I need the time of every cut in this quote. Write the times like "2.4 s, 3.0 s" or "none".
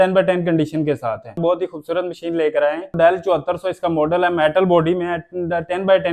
1.4 s, 2.9 s